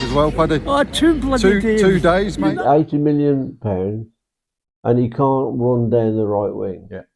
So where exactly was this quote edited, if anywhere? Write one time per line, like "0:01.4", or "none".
0:02.5